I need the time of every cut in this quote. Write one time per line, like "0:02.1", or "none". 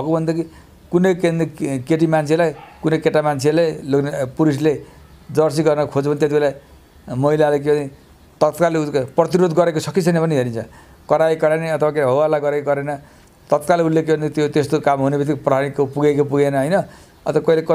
none